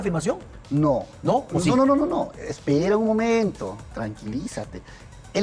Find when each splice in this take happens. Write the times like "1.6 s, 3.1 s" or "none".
none